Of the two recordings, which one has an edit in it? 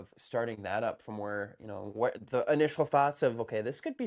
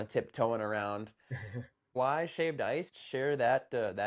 second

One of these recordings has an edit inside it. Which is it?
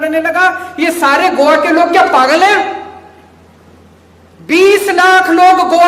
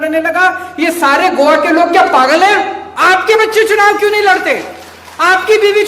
second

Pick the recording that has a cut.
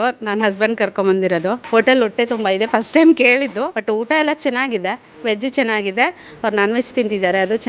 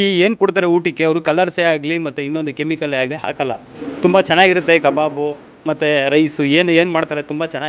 first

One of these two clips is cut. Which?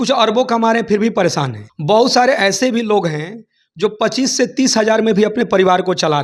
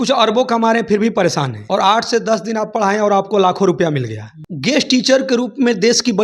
second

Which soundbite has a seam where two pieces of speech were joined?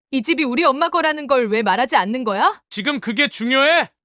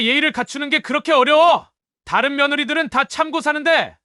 first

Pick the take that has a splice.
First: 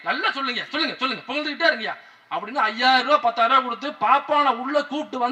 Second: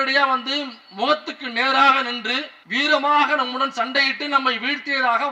second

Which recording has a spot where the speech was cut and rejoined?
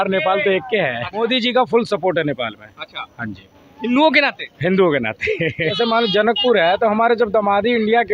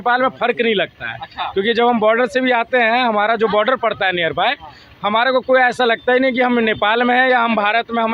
first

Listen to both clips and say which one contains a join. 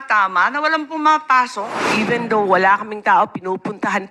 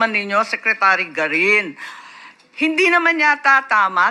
first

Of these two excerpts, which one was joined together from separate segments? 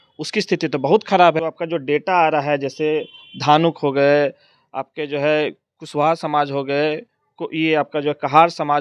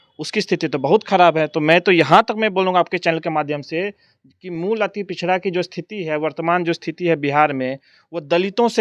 first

